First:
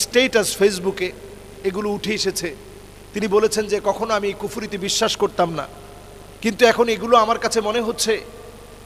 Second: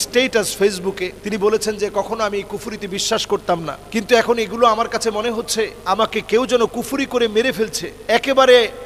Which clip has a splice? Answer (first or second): second